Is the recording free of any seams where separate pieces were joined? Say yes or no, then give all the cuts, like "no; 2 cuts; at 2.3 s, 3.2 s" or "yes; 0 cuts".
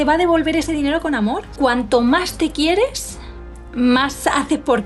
no; 1 cut; at 1.5 s